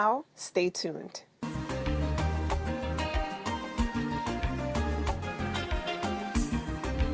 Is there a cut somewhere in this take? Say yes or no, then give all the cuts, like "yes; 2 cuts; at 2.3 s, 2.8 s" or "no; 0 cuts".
no; 0 cuts